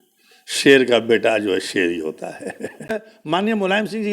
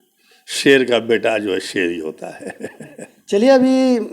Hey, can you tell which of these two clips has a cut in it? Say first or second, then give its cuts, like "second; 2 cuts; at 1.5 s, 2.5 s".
first; 1 cut; at 3.1 s